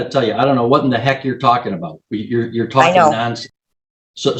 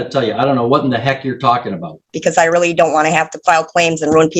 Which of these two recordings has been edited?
second; 1 cut; at 2.1 s

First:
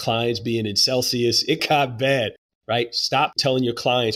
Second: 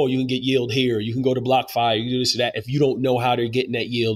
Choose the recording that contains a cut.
first; 3 cuts; at 1.6 s, 2.5 s, 3.4 s

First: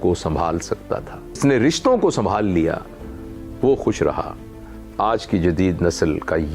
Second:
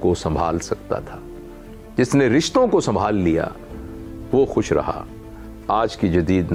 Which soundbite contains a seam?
first; 1 cut; at 1.4 s

